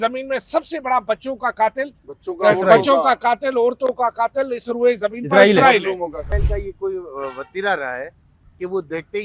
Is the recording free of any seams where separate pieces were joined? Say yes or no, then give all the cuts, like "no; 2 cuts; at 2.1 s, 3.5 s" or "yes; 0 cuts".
no; 1 cut; at 6.3 s